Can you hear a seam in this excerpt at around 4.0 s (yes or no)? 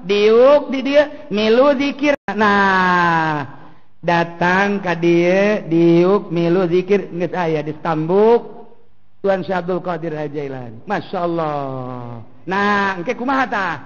no